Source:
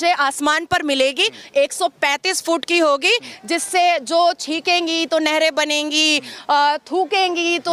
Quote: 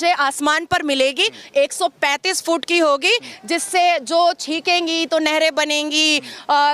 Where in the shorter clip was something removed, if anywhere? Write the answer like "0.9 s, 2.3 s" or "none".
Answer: none